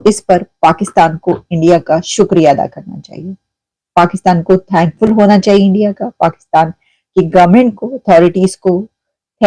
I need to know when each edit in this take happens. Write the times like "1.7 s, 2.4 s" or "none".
none